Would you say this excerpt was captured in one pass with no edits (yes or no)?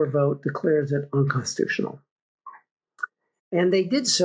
yes